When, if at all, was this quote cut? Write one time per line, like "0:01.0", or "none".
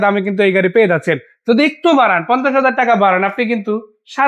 none